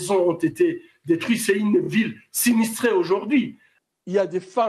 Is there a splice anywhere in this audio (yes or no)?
yes